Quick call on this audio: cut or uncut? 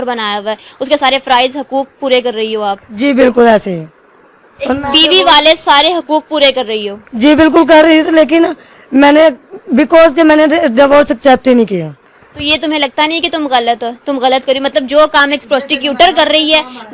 uncut